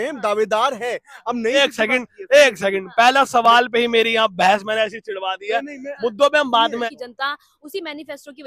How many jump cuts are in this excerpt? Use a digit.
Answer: 2